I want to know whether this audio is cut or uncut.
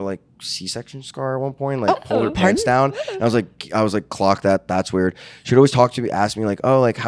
uncut